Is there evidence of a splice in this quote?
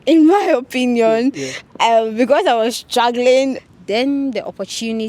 yes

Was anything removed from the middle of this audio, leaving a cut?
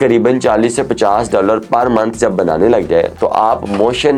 no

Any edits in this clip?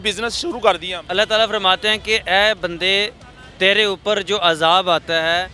yes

